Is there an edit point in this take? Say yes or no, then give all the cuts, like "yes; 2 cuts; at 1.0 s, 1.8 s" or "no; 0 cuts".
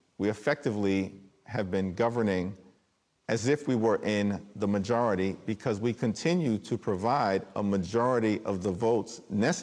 no; 0 cuts